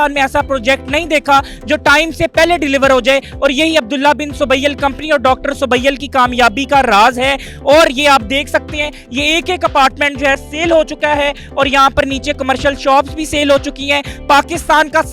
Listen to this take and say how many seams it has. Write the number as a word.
zero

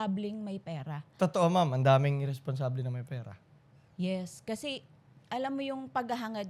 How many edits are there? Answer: zero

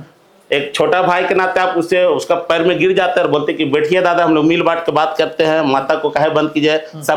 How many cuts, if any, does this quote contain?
zero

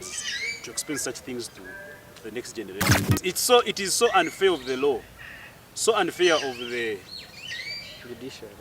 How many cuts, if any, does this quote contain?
one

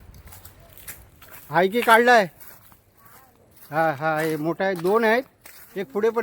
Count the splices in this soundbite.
one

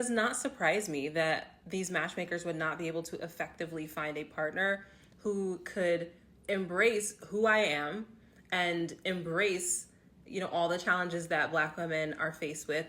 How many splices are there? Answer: two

